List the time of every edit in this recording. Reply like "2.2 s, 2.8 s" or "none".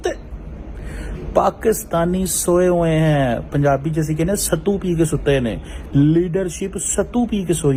none